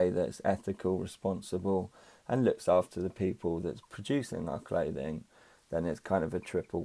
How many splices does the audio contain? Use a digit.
0